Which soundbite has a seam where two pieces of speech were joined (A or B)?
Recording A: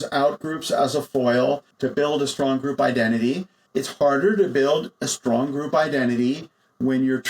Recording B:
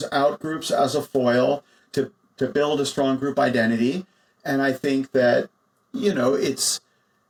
A